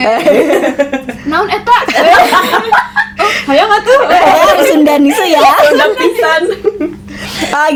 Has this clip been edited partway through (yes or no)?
no